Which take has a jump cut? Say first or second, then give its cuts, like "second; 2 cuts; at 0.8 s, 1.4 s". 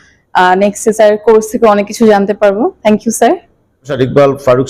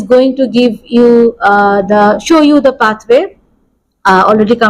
first; 1 cut; at 3.8 s